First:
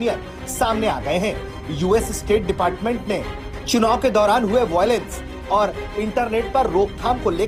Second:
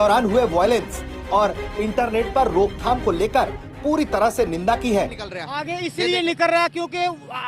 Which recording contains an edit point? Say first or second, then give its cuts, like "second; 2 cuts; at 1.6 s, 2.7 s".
second; 1 cut; at 5.2 s